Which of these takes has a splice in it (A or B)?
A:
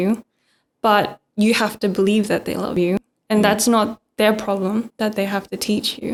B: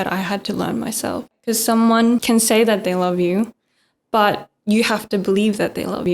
B